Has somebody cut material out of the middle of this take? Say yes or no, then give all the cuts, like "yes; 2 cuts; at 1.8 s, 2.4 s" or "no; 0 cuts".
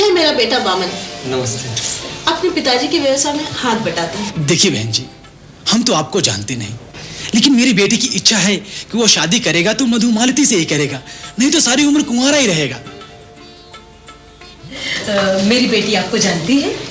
no; 0 cuts